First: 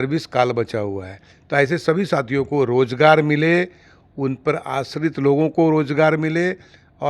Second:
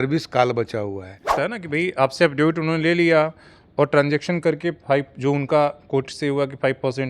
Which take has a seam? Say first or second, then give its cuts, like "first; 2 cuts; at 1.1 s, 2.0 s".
second; 1 cut; at 1.3 s